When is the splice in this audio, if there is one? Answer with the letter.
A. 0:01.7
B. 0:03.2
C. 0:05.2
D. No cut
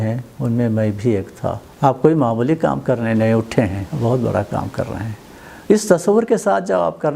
A